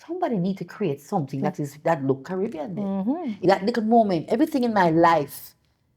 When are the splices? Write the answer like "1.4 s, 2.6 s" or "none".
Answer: 3.4 s